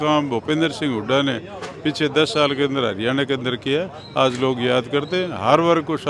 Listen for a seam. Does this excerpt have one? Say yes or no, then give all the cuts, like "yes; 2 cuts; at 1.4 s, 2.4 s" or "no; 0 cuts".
no; 0 cuts